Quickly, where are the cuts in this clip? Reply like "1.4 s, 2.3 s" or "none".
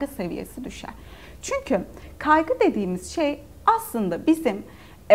none